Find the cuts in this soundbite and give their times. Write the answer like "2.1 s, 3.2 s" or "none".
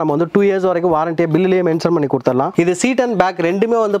2.5 s